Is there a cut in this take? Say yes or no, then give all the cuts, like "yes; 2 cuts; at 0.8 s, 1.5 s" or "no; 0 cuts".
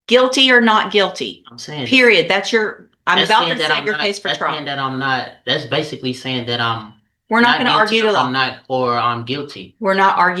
no; 0 cuts